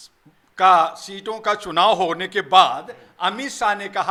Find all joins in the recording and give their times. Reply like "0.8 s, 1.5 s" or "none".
none